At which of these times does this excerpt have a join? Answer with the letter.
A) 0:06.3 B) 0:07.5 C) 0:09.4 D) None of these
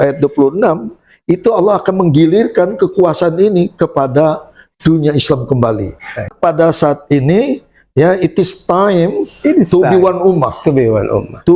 A